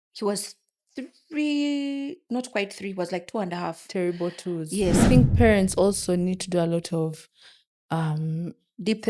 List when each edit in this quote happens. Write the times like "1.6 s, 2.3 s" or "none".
5.1 s